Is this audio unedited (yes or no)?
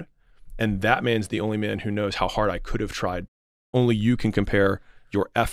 no